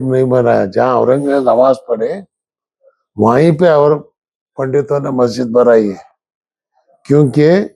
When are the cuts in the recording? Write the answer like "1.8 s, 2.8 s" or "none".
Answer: none